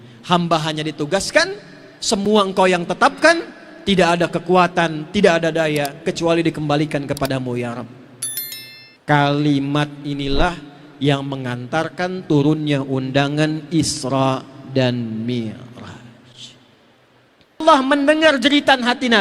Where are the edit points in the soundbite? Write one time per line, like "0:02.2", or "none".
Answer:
0:17.6